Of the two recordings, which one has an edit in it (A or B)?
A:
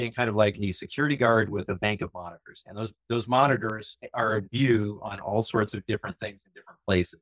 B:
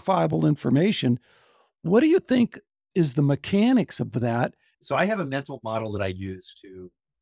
B